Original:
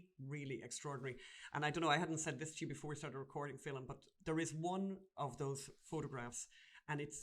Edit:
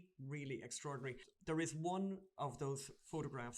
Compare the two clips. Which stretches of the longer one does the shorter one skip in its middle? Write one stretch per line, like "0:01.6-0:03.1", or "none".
0:01.3-0:04.1